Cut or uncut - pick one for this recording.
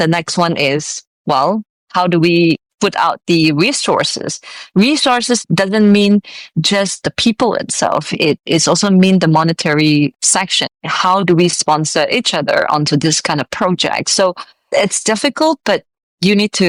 uncut